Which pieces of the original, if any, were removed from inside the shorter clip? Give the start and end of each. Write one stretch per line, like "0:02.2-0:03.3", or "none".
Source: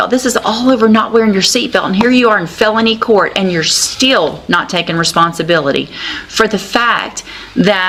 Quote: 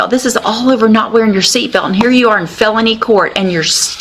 none